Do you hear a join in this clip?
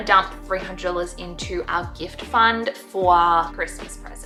no; 0 cuts

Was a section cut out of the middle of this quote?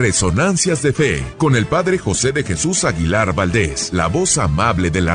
yes; 2 cuts; at 1.2 s, 3.8 s

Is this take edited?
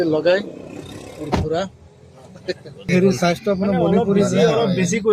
yes; 1 cut; at 2.9 s

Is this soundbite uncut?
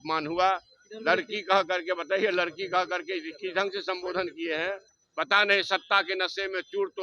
no; 1 cut; at 5.0 s

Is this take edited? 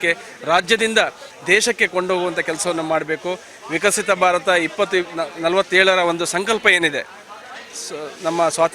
no; 0 cuts

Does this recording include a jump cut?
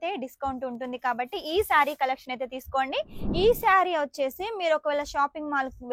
yes; 1 cut; at 3.2 s

